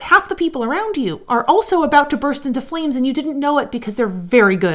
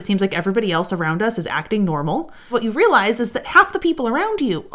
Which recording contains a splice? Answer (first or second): second